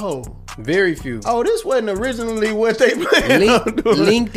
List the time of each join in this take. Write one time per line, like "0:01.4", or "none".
none

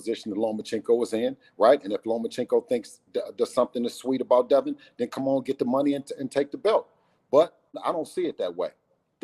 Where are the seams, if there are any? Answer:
0:07.8

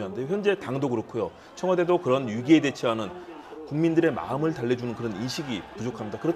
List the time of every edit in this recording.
none

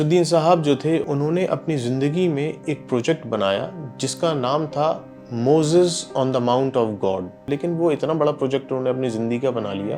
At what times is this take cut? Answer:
0:01.0
0:07.4

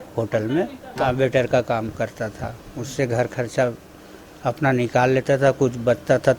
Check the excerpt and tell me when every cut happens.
0:01.0

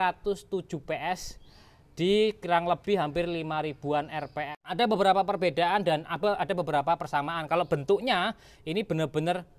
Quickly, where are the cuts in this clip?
0:04.5

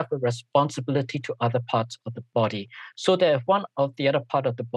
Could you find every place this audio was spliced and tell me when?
none

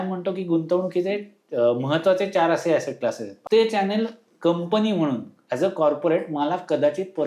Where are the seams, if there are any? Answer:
0:03.3

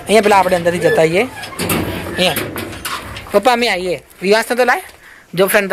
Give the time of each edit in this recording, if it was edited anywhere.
none

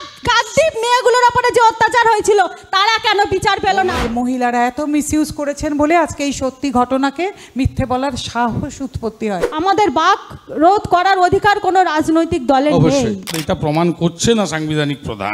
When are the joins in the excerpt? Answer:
0:04.0
0:09.5
0:13.3

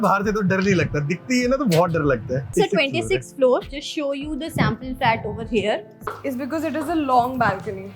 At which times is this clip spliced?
0:02.5
0:06.0

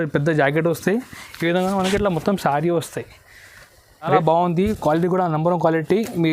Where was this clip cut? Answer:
0:04.1

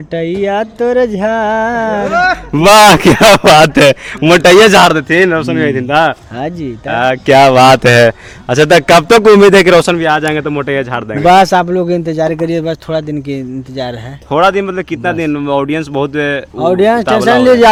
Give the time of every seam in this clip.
none

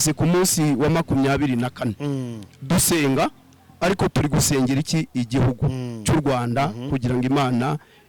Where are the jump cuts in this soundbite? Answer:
none

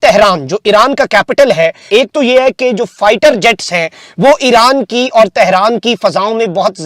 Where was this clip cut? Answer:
0:01.8

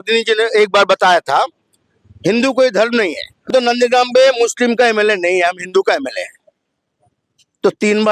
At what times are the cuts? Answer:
0:03.4

